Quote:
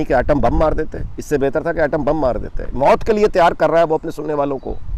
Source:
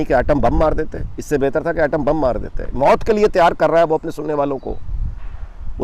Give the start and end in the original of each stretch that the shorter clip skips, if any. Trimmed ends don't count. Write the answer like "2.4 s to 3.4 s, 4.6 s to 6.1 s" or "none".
none